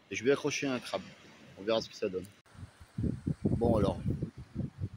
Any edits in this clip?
yes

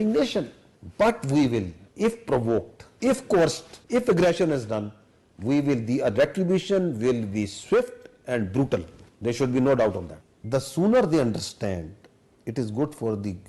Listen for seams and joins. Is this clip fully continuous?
yes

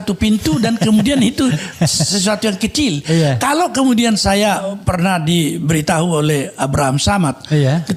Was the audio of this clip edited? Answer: no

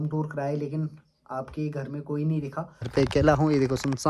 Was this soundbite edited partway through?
yes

